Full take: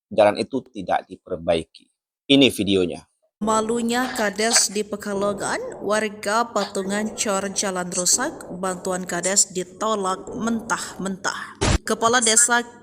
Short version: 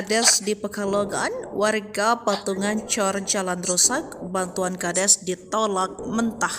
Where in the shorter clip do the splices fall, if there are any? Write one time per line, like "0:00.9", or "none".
none